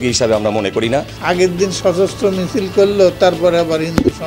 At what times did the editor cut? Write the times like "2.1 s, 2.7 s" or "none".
1.1 s